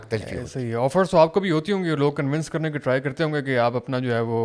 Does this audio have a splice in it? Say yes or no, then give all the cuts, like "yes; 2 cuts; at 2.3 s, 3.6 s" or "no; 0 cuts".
no; 0 cuts